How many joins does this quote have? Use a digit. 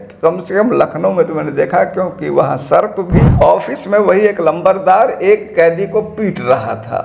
1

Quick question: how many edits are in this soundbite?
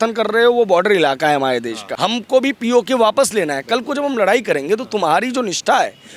1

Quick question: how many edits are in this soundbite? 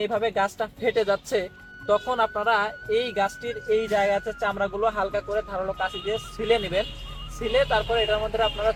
0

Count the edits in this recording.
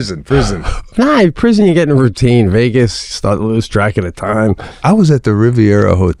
2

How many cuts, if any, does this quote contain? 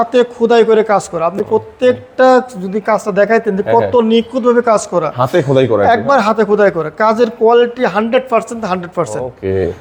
0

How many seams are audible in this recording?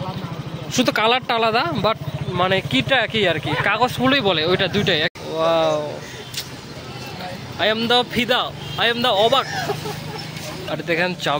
2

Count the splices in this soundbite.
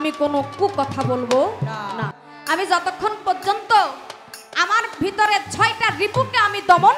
1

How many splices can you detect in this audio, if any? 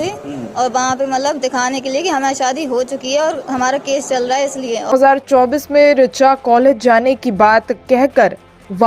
1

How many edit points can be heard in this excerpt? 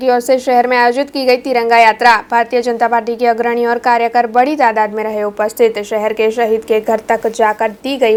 0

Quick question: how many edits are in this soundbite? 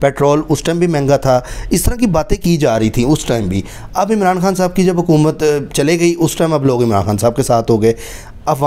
0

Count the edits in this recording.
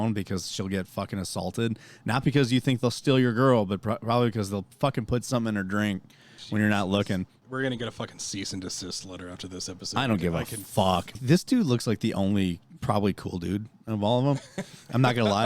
2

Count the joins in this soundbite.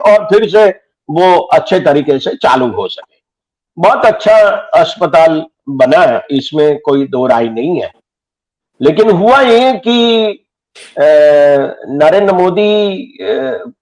0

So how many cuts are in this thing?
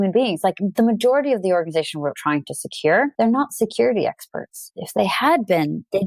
2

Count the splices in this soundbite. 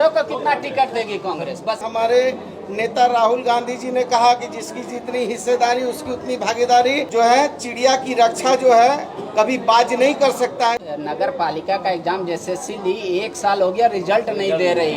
3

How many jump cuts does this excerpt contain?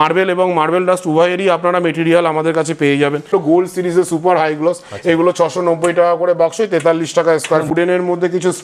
2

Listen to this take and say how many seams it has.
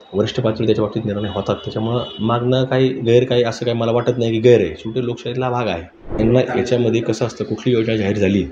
1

